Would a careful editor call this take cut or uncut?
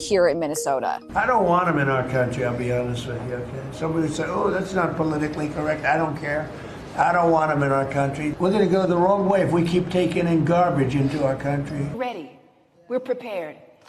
cut